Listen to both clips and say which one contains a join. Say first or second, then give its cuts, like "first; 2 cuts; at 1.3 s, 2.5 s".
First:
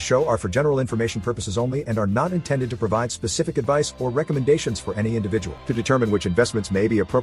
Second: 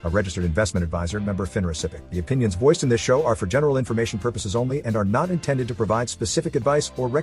second; 1 cut; at 2.0 s